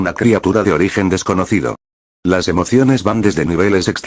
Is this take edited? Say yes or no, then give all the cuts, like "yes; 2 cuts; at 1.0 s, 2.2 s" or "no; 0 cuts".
yes; 1 cut; at 0.9 s